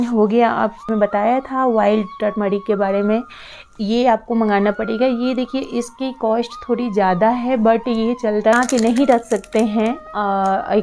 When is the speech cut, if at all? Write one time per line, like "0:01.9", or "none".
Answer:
0:00.9
0:08.5